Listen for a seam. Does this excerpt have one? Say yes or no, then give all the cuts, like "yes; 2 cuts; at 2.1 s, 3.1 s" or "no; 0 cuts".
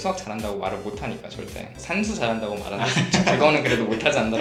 no; 0 cuts